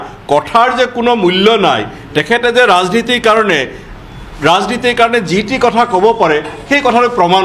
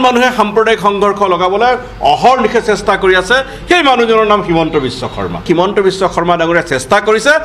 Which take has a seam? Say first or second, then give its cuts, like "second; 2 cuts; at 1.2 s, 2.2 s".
second; 1 cut; at 5.4 s